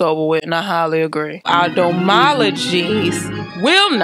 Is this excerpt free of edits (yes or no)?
no